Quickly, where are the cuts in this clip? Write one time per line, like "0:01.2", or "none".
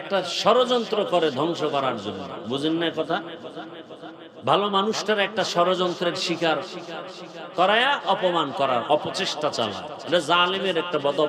none